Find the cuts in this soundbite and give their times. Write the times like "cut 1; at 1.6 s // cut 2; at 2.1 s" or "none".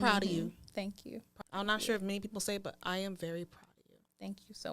cut 1; at 1.2 s